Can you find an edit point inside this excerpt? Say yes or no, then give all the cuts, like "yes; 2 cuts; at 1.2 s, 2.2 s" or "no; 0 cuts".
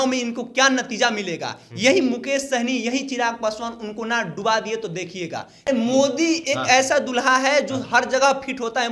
yes; 1 cut; at 5.7 s